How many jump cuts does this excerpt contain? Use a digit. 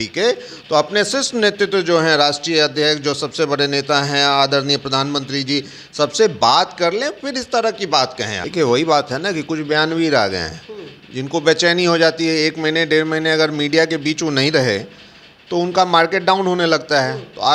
1